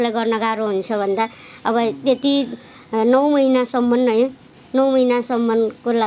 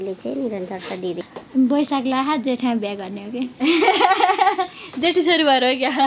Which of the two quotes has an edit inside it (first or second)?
second